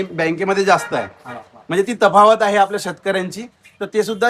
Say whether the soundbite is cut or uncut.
uncut